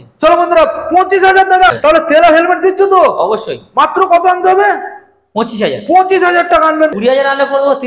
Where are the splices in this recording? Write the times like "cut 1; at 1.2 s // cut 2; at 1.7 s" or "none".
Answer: cut 1; at 1.8 s // cut 2; at 6.9 s